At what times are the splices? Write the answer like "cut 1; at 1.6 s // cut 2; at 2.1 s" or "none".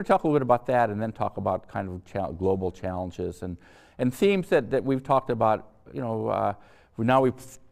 none